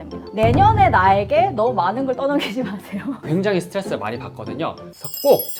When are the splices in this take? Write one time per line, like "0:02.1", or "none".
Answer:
none